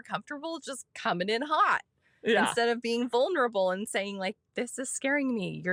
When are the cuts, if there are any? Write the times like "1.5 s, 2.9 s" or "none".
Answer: none